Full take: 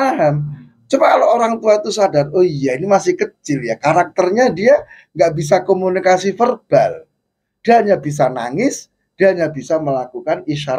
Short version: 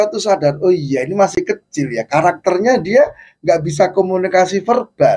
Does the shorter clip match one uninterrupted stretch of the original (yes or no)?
yes